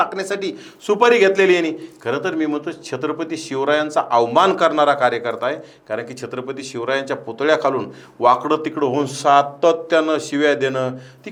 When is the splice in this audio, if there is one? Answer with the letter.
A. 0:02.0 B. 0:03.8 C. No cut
C